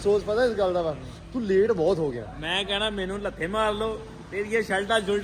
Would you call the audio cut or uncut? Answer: uncut